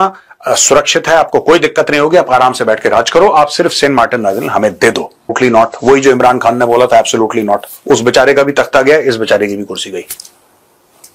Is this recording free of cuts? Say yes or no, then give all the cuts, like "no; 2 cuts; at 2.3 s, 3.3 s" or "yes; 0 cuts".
no; 1 cut; at 5.4 s